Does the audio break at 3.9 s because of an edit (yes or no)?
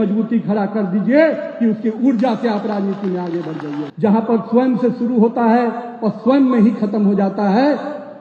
yes